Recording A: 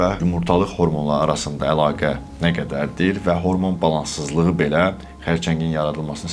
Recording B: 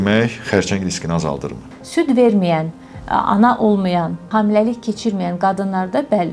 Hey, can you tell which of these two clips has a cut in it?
B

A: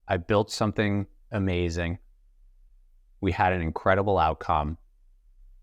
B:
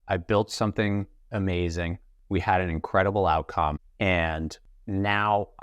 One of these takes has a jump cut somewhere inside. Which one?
B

